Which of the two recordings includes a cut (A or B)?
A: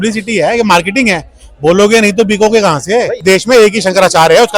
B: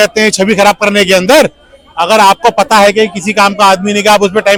A